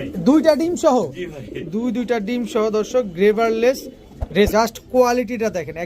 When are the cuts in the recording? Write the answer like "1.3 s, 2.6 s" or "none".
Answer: 4.5 s